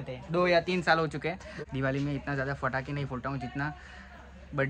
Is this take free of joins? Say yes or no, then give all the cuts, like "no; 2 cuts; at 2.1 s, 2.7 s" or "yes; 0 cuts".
no; 1 cut; at 1.5 s